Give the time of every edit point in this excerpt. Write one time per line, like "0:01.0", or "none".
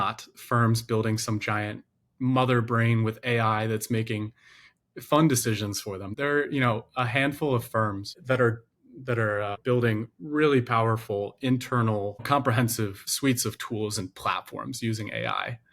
0:06.1
0:08.2
0:09.6
0:12.2
0:13.0